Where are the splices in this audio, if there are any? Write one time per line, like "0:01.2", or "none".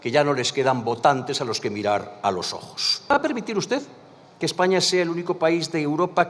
0:03.1